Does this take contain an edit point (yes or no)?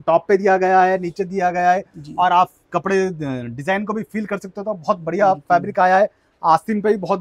no